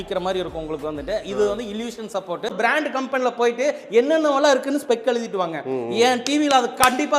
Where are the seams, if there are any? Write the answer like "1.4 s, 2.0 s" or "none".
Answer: 2.5 s